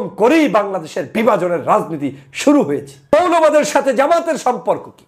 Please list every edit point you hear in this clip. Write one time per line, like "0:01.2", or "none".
0:02.9